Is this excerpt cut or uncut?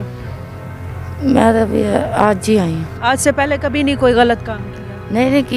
cut